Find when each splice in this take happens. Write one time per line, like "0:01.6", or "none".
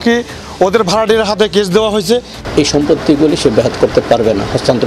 0:02.3